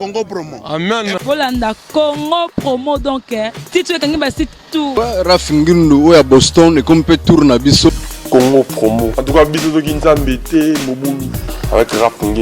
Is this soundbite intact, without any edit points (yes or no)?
no